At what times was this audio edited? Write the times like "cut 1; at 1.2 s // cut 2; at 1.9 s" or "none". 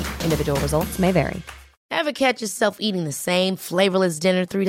cut 1; at 1.7 s